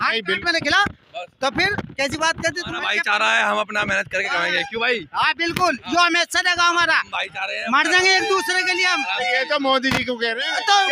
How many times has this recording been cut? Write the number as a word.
one